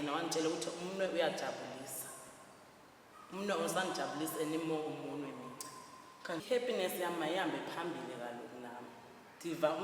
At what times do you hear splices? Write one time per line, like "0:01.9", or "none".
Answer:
0:06.4